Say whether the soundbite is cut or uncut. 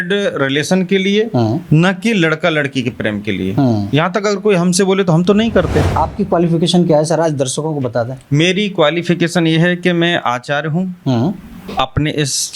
cut